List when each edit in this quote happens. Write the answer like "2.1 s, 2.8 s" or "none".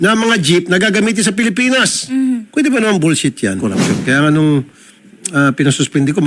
3.6 s

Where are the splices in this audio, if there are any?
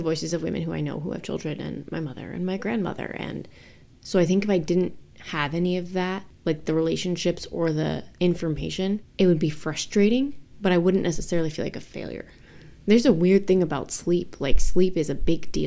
3.8 s

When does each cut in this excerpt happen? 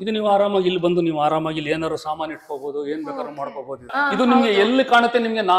3.9 s

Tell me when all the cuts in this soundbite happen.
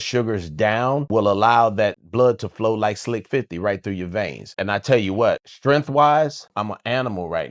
1.1 s, 2.0 s, 4.5 s, 5.5 s, 6.5 s

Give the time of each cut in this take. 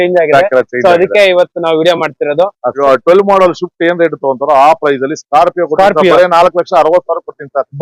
2.6 s

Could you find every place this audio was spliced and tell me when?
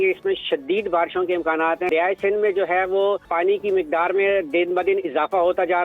1.9 s, 3.3 s

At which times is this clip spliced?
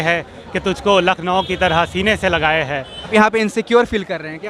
2.9 s

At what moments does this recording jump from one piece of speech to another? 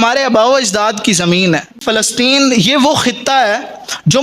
1.8 s

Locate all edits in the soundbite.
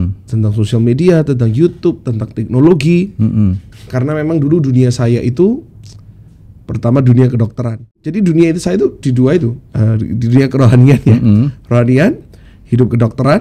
8.1 s

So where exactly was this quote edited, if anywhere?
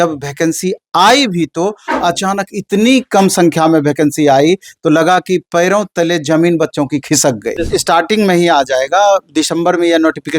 7.5 s

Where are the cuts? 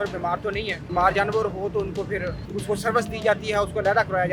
0.9 s, 2.4 s

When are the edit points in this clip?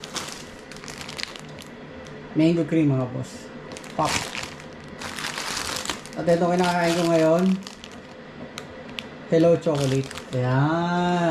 2.1 s

